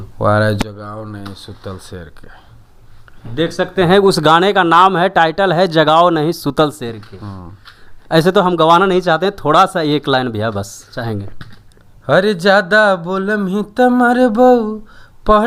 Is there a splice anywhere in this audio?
no; 0 cuts

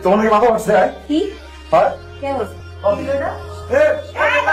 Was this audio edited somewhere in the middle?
no; 0 cuts

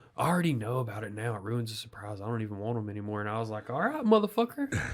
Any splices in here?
no; 0 cuts

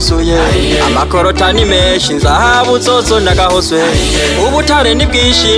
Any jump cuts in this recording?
no; 0 cuts

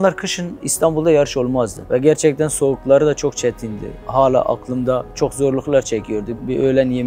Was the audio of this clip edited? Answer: yes; 1 cut; at 5.1 s

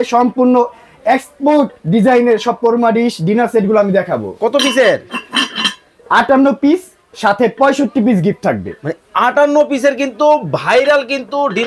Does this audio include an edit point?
no; 0 cuts

